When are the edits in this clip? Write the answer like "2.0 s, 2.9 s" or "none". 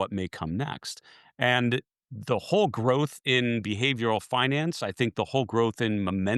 none